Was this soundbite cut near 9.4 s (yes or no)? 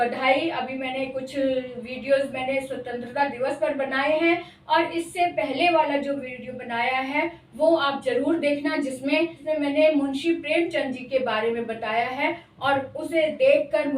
yes